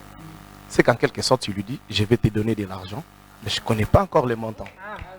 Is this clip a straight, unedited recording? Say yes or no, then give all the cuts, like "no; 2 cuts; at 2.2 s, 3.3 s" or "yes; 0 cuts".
yes; 0 cuts